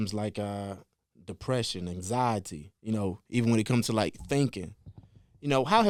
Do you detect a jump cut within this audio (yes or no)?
no